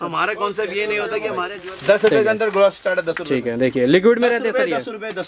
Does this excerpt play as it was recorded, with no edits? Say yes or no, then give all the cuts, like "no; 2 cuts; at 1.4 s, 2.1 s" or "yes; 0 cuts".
no; 1 cut; at 1.5 s